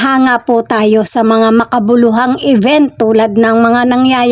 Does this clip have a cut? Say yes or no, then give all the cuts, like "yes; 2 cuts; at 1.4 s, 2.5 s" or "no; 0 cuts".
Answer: no; 0 cuts